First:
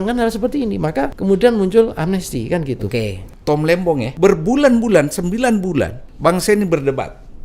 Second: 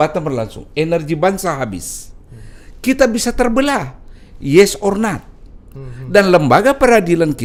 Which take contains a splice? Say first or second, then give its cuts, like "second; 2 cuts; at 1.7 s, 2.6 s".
first; 4 cuts; at 1.1 s, 3.3 s, 4.1 s, 6.0 s